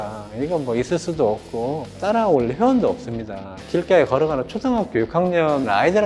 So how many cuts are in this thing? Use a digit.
1